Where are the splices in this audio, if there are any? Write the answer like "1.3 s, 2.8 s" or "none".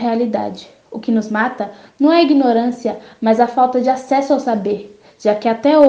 none